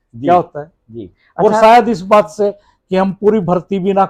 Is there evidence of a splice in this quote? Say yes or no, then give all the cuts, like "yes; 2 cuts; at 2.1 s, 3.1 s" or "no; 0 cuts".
no; 0 cuts